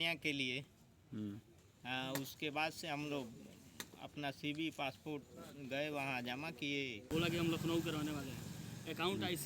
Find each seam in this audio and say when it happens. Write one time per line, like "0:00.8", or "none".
0:07.1